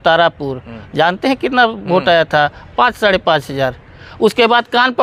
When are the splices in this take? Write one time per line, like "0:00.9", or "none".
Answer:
none